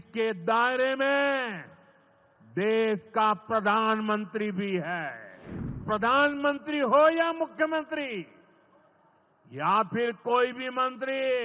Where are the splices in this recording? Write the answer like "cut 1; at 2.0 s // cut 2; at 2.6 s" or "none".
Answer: cut 1; at 5.8 s